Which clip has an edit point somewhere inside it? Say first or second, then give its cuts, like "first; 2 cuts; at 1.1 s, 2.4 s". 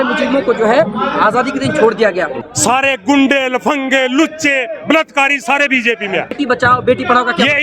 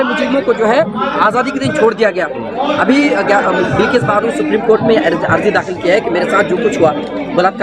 first; 2 cuts; at 2.4 s, 6.4 s